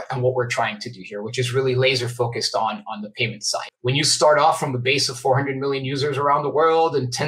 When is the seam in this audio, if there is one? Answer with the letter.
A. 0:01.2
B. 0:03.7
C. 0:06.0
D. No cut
B